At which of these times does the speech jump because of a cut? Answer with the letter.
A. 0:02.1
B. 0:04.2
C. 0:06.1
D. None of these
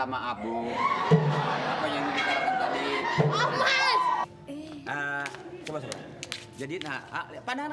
B